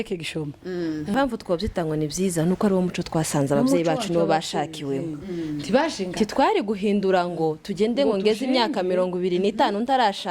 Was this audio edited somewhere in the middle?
yes; 1 cut; at 1.1 s

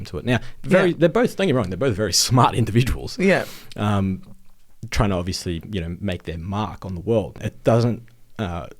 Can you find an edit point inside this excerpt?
yes; 1 cut; at 7.4 s

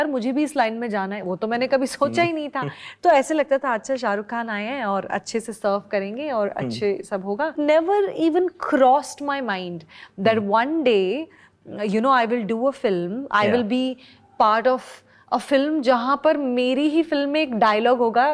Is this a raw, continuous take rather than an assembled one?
yes; 0 cuts

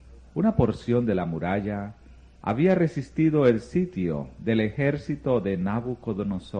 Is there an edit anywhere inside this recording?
no; 0 cuts

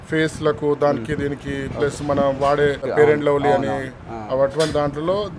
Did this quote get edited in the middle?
yes; 1 cut; at 2.9 s

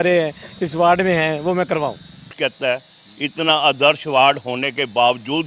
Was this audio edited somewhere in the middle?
yes; 1 cut; at 2.3 s

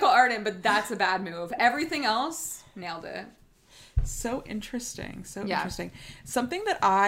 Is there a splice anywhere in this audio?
no; 0 cuts

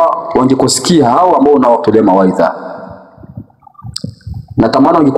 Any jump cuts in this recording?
no; 0 cuts

